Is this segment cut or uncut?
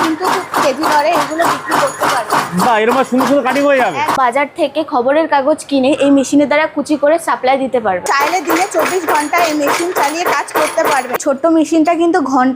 cut